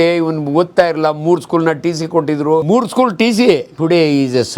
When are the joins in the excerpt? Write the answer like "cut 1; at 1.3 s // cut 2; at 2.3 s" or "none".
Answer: cut 1; at 2.6 s // cut 2; at 3.7 s